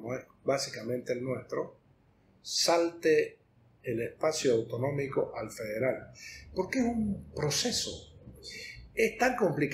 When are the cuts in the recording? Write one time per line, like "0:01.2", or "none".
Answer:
none